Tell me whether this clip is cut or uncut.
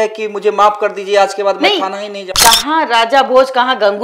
cut